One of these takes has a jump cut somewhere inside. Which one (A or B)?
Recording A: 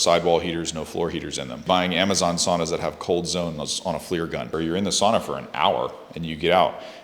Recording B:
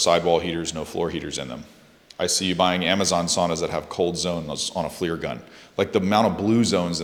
A